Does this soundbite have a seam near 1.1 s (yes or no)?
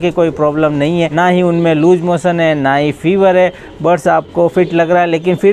yes